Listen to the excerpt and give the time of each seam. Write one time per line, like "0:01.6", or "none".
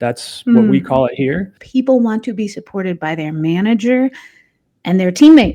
0:01.6